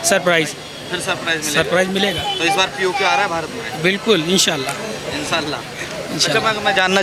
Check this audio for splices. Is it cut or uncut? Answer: uncut